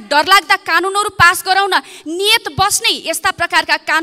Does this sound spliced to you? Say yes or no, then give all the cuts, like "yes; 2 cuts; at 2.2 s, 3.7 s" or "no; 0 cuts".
no; 0 cuts